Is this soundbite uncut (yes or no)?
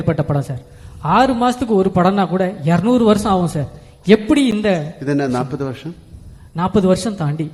yes